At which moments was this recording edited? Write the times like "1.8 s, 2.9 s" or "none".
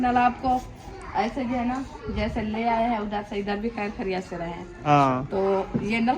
4.7 s